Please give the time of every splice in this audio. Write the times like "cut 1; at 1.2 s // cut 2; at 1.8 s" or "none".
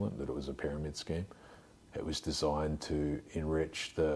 none